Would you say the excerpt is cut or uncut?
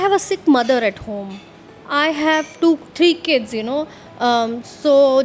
cut